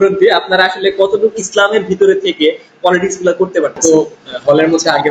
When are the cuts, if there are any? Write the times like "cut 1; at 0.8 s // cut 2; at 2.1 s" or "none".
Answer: cut 1; at 3.8 s

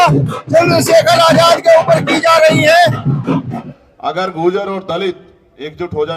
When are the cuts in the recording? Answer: cut 1; at 3.7 s

